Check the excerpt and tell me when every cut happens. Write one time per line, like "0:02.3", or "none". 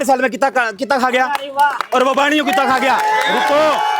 none